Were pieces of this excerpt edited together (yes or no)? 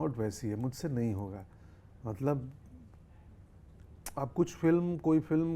no